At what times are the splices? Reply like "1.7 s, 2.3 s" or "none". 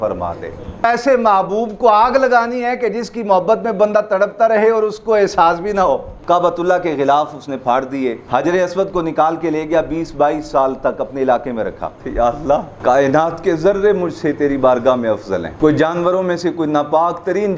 0.8 s, 6.1 s, 8.2 s, 12.0 s, 12.7 s, 15.5 s